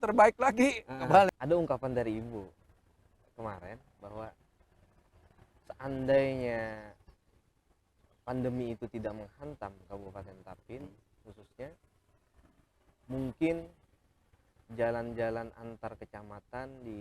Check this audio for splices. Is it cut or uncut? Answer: cut